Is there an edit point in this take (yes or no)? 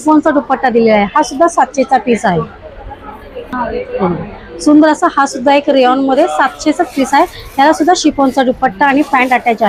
no